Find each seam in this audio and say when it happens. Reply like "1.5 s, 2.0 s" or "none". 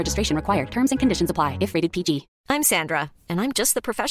2.3 s